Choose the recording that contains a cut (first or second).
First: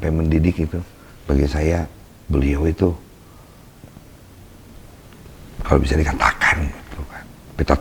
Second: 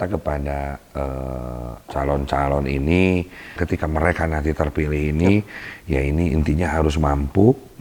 second